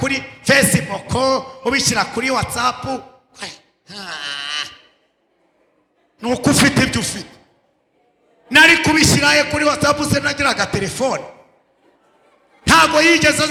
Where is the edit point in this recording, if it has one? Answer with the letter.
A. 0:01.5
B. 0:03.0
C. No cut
C